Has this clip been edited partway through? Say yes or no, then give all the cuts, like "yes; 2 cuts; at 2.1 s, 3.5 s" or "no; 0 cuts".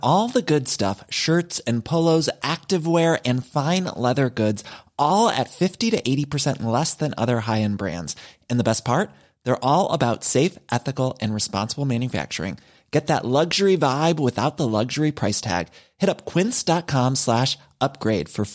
no; 0 cuts